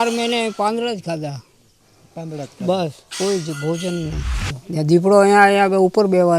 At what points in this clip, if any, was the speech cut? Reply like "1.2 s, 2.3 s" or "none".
4.6 s